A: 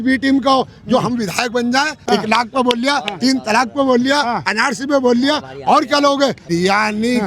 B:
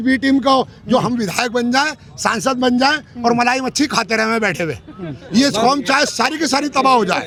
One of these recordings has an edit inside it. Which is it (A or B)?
A